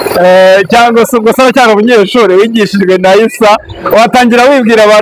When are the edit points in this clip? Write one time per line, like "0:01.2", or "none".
none